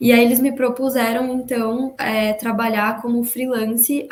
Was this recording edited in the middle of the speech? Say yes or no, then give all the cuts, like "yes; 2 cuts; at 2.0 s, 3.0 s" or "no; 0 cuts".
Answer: no; 0 cuts